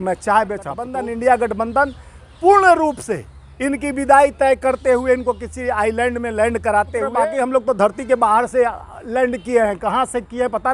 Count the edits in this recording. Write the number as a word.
two